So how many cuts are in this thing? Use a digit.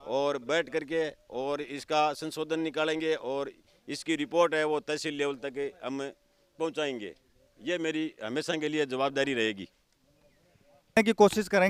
0